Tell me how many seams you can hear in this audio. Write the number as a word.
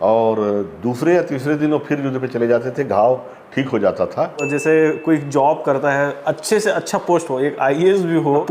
one